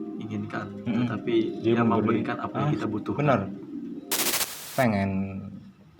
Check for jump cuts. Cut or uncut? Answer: cut